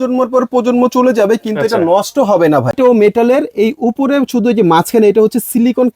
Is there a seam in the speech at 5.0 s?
no; 1 cut; at 2.8 s

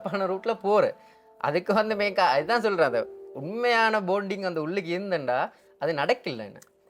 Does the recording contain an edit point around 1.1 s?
no; 0 cuts

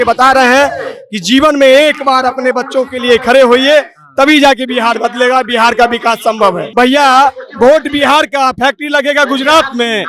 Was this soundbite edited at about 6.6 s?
yes; 1 cut; at 6.6 s

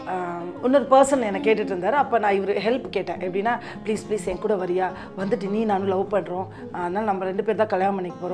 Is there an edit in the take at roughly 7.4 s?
no; 0 cuts

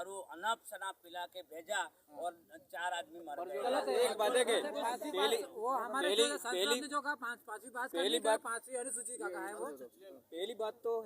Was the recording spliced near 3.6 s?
yes; 1 cut; at 3.6 s

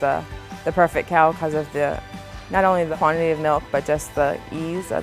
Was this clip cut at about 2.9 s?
yes; 1 cut; at 2.9 s

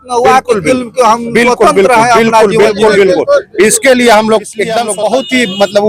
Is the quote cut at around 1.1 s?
no; 1 cut; at 4.8 s

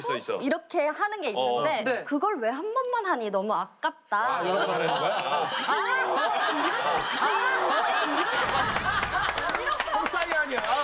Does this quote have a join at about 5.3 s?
no; 1 cut; at 2.0 s

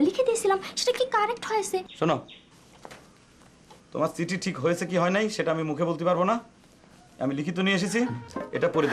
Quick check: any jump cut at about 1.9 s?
yes; 1 cut; at 1.9 s

